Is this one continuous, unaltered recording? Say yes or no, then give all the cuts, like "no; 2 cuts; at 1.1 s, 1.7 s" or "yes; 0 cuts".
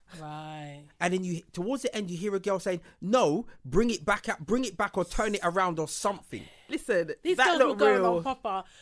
yes; 0 cuts